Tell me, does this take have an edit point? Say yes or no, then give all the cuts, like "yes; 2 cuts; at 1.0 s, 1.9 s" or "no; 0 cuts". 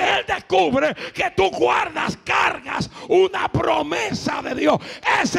no; 0 cuts